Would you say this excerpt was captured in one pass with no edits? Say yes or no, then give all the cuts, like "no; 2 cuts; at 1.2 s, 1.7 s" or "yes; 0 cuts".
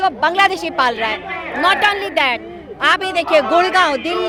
yes; 0 cuts